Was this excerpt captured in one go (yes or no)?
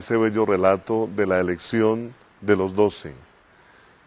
no